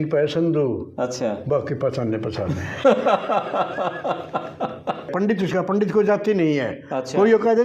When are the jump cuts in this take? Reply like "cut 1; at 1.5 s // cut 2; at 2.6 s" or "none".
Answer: cut 1; at 5.1 s